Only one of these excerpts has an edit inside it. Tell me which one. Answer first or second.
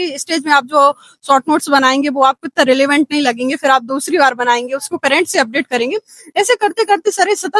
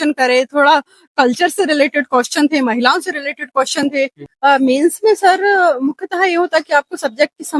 second